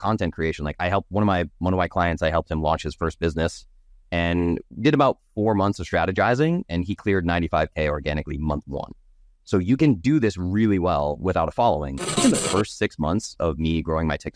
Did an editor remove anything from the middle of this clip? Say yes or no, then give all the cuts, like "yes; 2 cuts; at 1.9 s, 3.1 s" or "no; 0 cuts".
yes; 1 cut; at 12.2 s